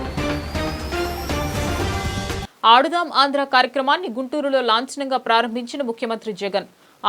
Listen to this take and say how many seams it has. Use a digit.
1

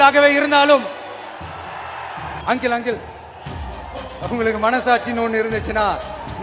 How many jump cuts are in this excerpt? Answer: 1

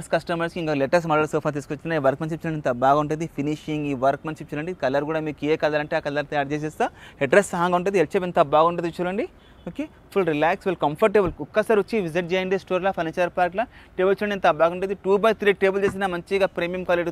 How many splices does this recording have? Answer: 0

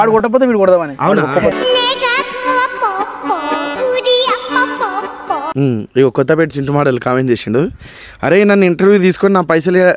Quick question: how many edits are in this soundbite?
2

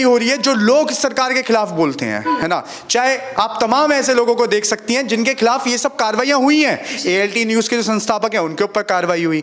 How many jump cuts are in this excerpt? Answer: 0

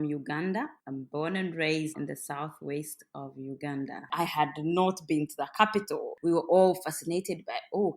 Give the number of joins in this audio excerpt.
2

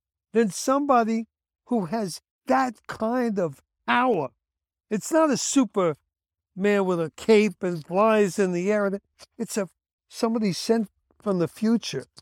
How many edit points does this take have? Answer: 0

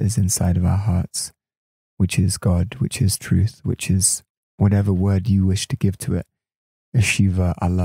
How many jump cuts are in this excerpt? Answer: 0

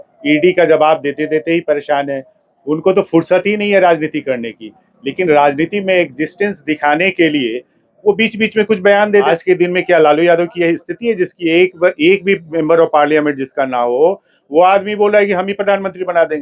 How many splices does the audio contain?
1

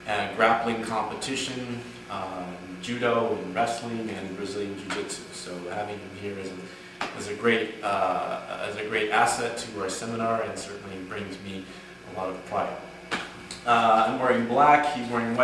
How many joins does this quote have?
1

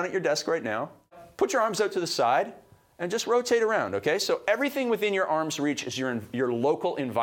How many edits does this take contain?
1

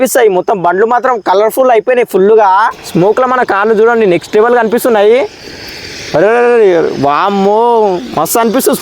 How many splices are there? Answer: 1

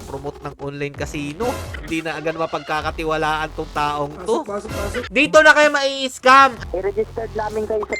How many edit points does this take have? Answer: 3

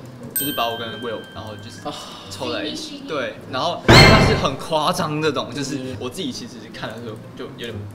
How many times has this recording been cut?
1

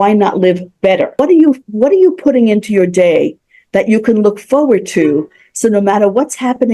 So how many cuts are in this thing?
1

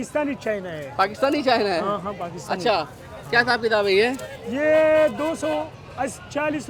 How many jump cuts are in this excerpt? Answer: 0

